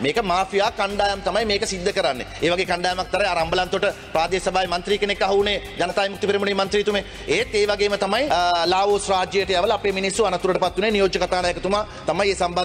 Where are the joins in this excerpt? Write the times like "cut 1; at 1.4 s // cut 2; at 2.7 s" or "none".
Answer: none